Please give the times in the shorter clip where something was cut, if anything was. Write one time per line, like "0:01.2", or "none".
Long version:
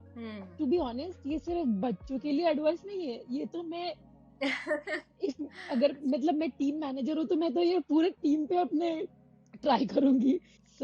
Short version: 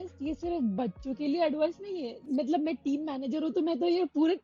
0:02.2